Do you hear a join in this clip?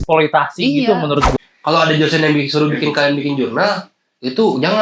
yes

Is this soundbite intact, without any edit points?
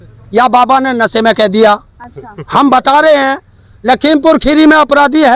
yes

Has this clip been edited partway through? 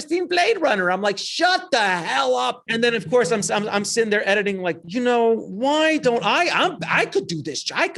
yes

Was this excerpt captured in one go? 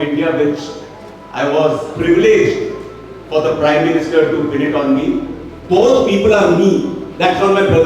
no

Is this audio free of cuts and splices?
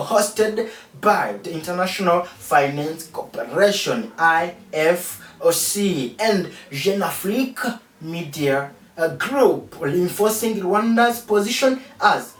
yes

